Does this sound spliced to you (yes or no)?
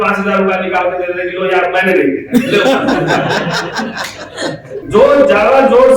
yes